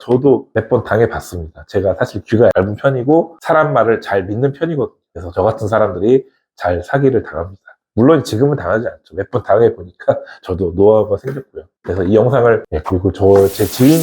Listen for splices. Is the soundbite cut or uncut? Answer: cut